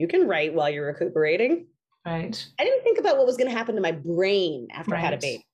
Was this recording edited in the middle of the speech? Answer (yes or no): no